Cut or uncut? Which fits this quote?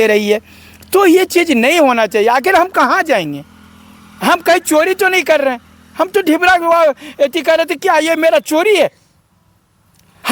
uncut